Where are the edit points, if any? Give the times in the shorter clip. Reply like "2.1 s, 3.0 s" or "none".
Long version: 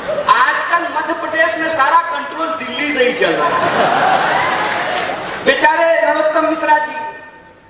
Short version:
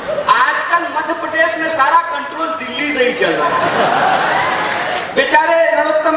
5.0 s